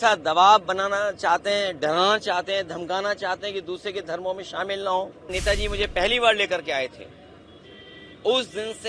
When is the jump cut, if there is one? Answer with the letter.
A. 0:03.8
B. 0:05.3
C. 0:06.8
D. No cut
B